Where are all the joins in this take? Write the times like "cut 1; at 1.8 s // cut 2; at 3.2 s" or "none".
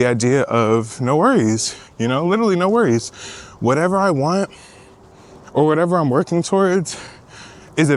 none